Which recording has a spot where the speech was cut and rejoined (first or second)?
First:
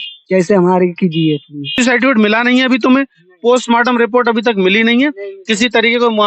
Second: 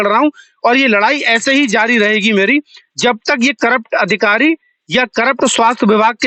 first